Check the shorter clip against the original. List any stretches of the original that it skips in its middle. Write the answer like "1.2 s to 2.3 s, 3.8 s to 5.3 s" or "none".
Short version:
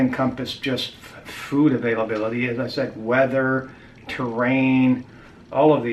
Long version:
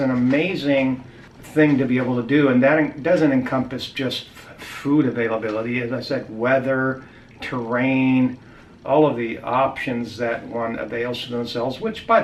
none